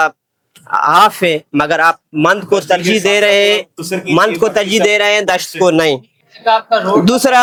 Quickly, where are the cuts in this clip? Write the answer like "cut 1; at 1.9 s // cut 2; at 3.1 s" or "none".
none